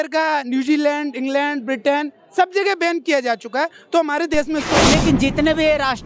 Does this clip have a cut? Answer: yes; 1 cut; at 4.7 s

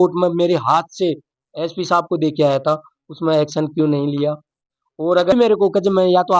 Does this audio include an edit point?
yes; 1 cut; at 5.3 s

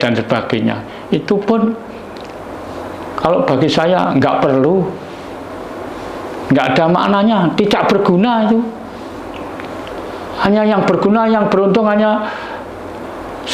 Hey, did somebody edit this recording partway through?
no; 0 cuts

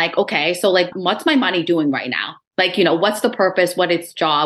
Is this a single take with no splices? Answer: yes; 0 cuts

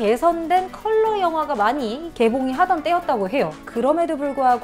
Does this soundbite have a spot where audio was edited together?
no; 0 cuts

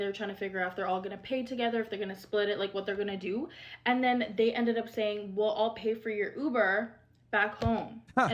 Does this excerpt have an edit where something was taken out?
yes; 1 cut; at 4.3 s

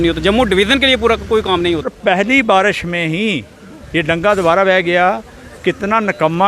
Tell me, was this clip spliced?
yes; 1 cut; at 1.9 s

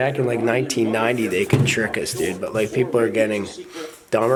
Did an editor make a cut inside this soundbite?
no; 0 cuts

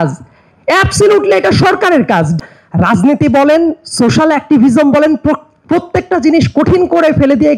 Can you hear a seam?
yes; 1 cut; at 2.4 s

